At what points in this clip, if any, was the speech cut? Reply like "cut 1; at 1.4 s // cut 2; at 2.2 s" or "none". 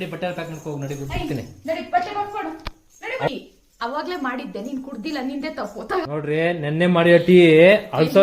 cut 1; at 3.3 s // cut 2; at 6.1 s

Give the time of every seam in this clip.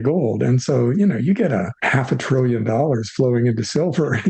cut 1; at 1.8 s

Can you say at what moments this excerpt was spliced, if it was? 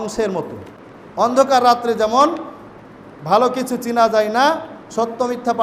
cut 1; at 1.3 s

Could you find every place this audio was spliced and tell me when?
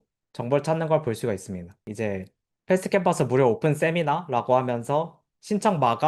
cut 1; at 1.9 s

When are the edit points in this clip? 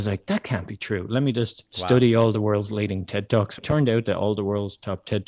cut 1; at 1.7 s // cut 2; at 3.6 s

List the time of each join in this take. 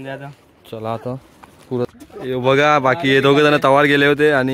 cut 1; at 1.9 s

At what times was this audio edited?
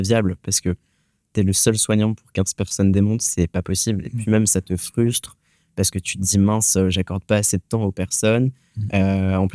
none

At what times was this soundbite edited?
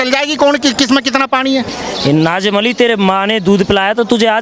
cut 1; at 1.7 s

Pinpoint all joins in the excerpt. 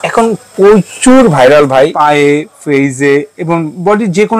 cut 1; at 1.9 s

